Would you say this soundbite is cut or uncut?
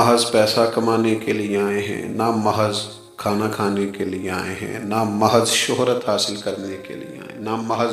uncut